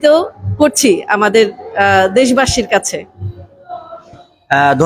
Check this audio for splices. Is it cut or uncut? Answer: uncut